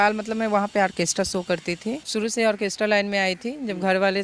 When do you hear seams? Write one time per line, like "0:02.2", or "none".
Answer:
0:02.1

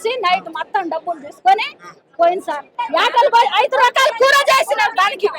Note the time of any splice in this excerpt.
0:02.7

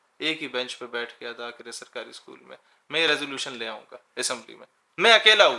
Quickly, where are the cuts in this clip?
none

